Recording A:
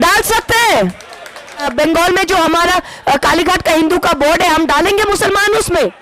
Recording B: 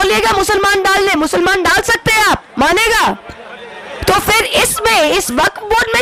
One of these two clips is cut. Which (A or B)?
A